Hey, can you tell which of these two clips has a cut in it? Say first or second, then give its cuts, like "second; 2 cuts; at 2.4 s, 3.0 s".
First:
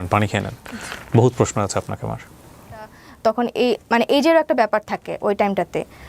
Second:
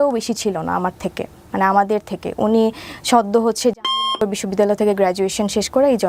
first; 1 cut; at 3.0 s